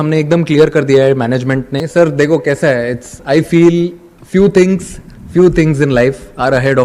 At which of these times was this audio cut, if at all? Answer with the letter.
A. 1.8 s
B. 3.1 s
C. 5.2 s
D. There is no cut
A